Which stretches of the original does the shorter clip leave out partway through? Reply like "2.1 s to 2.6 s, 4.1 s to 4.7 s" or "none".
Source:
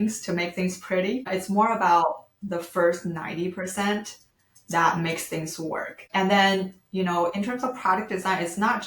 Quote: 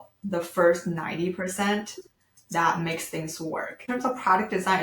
6.1 s to 7.5 s